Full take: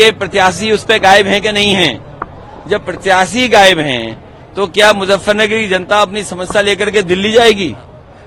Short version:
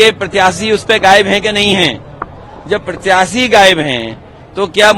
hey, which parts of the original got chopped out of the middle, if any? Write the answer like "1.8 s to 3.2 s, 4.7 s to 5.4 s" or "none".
none